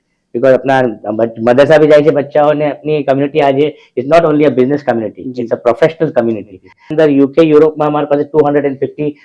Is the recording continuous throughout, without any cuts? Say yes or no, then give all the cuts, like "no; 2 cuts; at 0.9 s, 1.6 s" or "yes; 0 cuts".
no; 1 cut; at 6.9 s